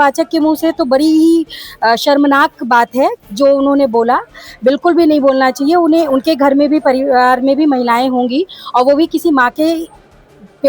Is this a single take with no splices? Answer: yes; 0 cuts

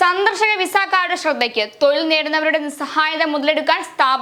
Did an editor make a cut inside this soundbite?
no; 0 cuts

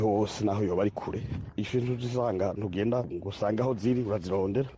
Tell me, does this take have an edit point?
yes; 1 cut; at 1.5 s

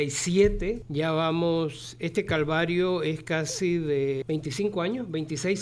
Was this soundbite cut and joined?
yes; 2 cuts; at 0.8 s, 4.2 s

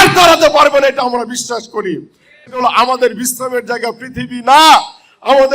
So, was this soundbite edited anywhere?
yes; 1 cut; at 2.5 s

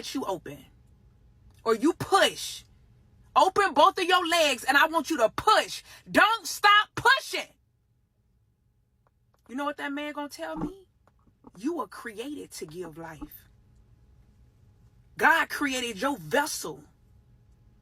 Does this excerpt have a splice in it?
yes; 1 cut; at 16.6 s

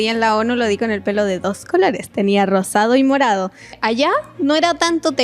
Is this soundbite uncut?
no; 1 cut; at 3.7 s

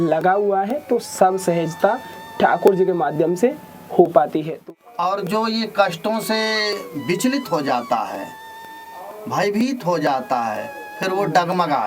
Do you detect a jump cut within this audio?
yes; 1 cut; at 4.5 s

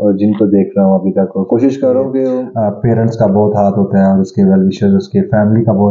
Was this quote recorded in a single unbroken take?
no; 1 cut; at 2.5 s

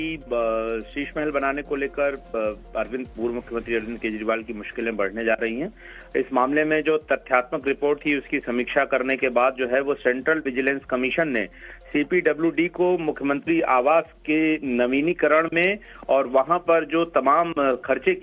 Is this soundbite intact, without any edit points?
yes; 0 cuts

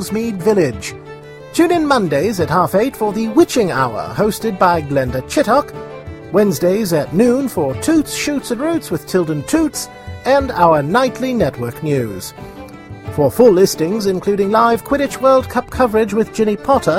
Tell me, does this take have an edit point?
no; 0 cuts

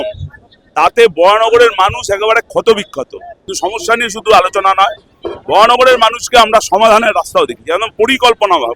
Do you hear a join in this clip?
yes; 1 cut; at 3.4 s

